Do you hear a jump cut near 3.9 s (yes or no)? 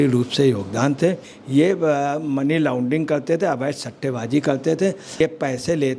no